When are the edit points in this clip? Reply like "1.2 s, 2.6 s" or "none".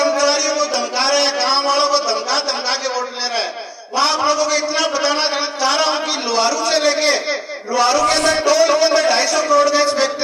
none